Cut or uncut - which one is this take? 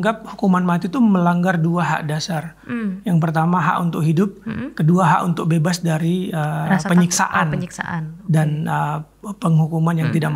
uncut